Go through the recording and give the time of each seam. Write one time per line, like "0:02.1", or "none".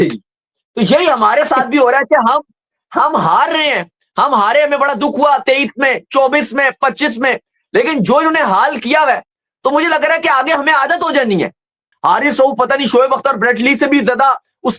0:11.9